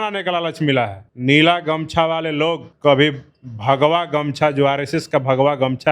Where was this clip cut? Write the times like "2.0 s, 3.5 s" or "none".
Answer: 1.1 s, 2.7 s